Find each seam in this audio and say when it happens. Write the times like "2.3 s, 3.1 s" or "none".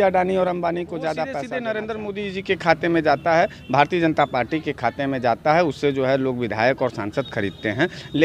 1.5 s